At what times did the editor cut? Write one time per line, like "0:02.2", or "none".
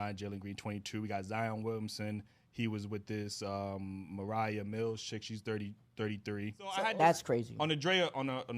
0:06.8